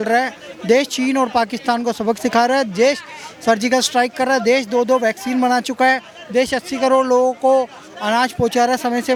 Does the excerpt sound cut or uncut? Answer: uncut